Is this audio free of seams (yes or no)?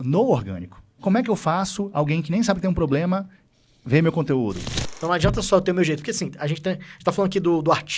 no